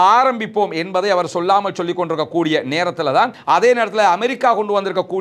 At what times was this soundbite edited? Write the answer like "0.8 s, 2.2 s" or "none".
3.4 s